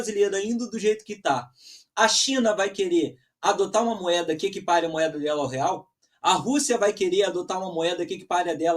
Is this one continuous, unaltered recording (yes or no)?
yes